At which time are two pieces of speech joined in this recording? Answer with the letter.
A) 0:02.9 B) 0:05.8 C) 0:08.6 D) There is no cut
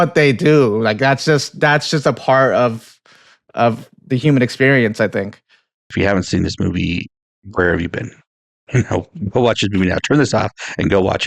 B